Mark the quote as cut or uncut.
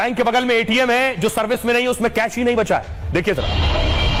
uncut